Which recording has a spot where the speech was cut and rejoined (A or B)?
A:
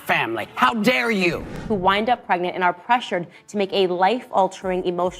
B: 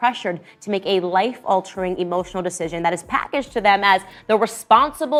A